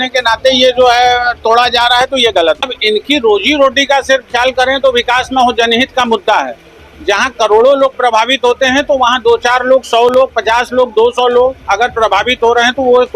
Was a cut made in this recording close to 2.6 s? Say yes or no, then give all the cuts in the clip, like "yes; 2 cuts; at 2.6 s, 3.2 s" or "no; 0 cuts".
yes; 1 cut; at 2.6 s